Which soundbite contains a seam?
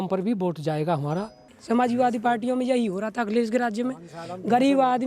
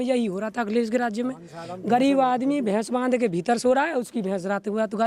first; 1 cut; at 1.5 s

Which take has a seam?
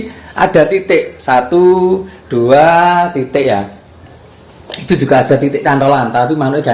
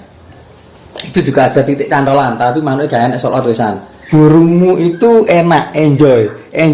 second; 1 cut; at 3.9 s

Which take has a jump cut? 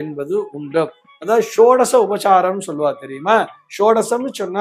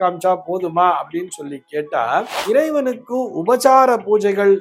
second; 1 cut; at 2.3 s

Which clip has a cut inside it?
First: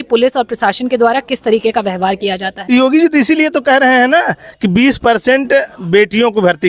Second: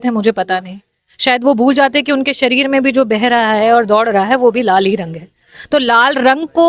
first; 1 cut; at 2.5 s

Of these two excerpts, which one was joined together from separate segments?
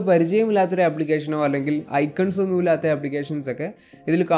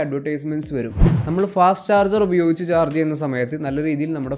second; 1 cut; at 1.1 s

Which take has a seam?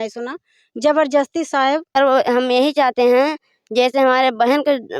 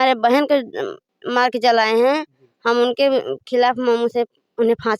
first; 1 cut; at 2.0 s

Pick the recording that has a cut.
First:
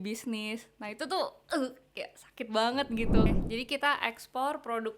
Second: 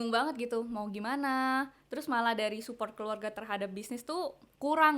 first; 1 cut; at 3.3 s

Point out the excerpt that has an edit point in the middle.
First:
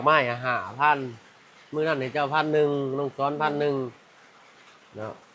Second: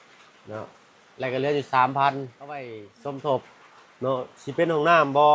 second; 1 cut; at 2.8 s

